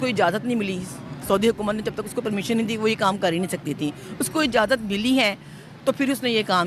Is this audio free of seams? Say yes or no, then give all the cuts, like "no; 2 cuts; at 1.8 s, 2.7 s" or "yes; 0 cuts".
yes; 0 cuts